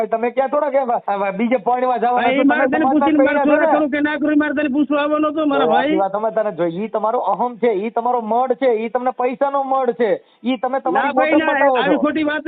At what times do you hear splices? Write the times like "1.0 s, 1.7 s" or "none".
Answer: 1.0 s

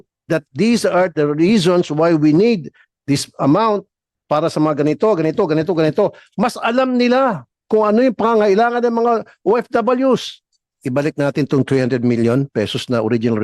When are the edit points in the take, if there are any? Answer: 10.7 s

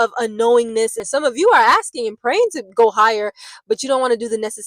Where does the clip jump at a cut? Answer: 1.0 s

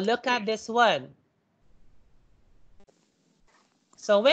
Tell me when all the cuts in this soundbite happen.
none

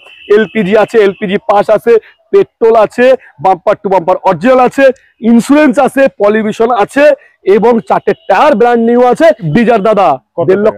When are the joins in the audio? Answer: 9.5 s

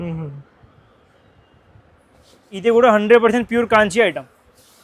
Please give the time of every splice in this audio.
2.6 s

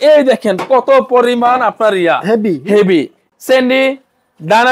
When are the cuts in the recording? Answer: 3.2 s

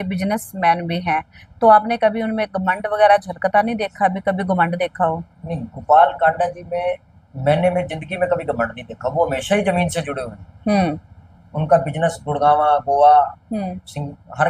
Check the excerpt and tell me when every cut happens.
none

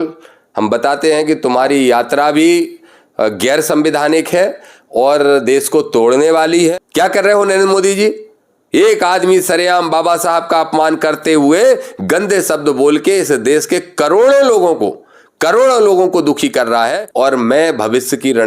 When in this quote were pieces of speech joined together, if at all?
6.8 s, 17.0 s

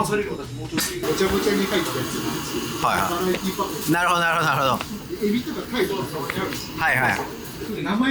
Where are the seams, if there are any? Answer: 1.0 s

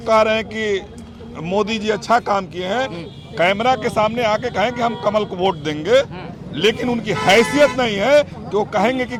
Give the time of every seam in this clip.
none

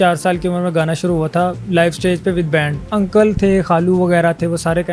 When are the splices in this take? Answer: 2.8 s

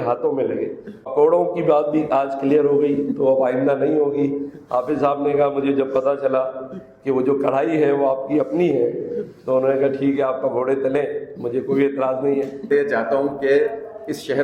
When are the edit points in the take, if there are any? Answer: 1.1 s, 12.7 s

